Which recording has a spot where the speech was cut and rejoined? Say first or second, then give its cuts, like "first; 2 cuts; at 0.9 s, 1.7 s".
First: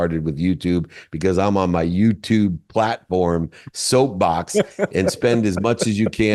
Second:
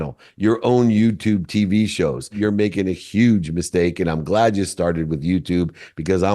second; 1 cut; at 2.4 s